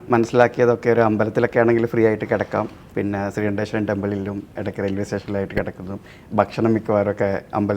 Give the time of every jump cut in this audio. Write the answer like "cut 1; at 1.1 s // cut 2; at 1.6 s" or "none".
cut 1; at 2.8 s